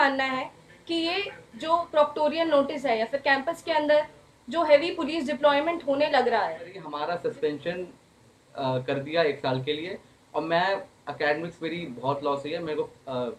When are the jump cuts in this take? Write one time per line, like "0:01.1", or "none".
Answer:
0:06.8